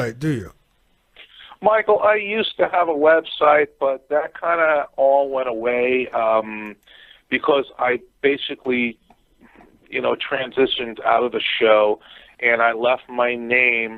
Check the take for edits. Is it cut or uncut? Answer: uncut